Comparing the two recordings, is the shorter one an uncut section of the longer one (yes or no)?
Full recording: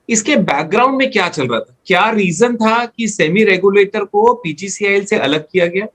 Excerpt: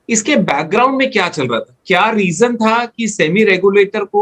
yes